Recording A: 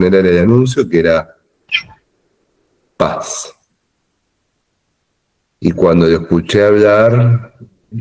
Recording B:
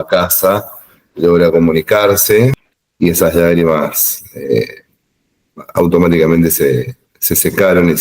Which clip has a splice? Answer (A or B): B